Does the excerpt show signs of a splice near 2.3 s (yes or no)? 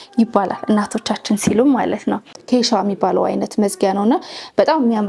yes